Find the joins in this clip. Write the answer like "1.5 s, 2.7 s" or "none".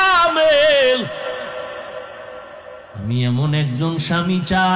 2.9 s